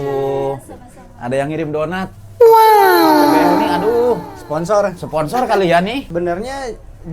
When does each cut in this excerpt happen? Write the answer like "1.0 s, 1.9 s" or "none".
6.1 s